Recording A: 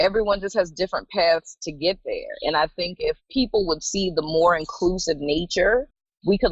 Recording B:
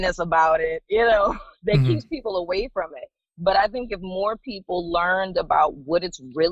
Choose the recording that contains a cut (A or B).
A